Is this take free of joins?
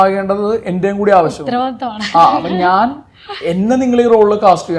yes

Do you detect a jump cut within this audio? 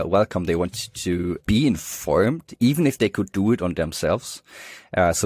yes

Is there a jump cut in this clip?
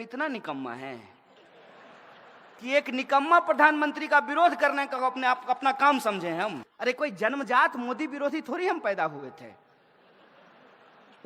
yes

